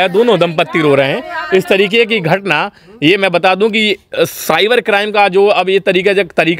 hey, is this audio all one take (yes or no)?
yes